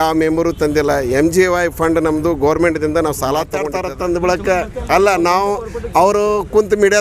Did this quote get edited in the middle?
yes; 1 cut; at 3.6 s

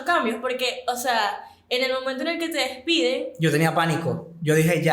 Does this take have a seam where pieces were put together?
no; 0 cuts

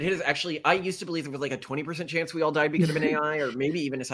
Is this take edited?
no; 0 cuts

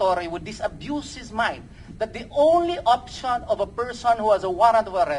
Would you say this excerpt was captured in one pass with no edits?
yes; 0 cuts

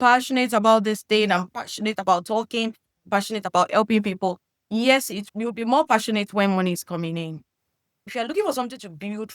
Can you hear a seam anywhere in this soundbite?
yes; 2 cuts; at 5.2 s, 8.1 s

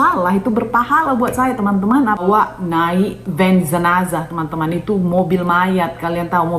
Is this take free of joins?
no; 1 cut; at 2.2 s

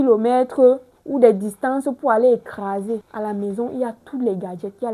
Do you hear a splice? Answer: yes; 1 cut; at 3.1 s

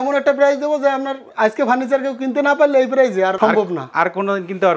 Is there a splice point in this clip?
no; 0 cuts

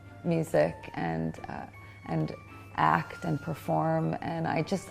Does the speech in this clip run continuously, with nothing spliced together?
yes; 0 cuts

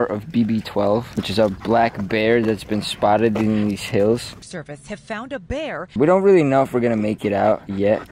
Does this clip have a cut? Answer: yes; 2 cuts; at 1.2 s, 6.0 s

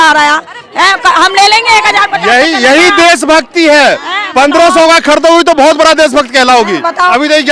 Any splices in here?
no; 0 cuts

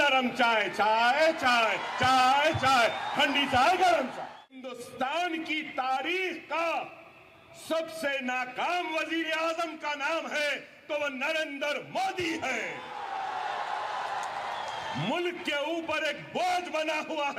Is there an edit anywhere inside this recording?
yes; 1 cut; at 4.7 s

